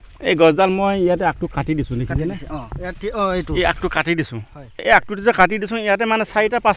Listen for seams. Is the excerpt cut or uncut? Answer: cut